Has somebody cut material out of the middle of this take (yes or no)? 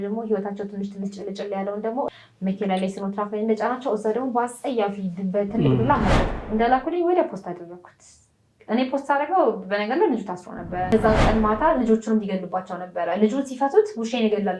yes